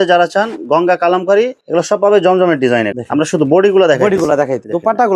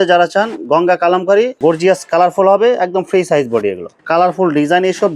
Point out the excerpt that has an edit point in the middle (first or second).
second